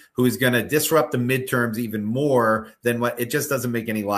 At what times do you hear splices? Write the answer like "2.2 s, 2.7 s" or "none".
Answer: none